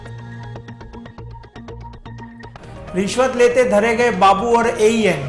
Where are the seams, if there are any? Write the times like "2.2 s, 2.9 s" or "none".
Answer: 2.5 s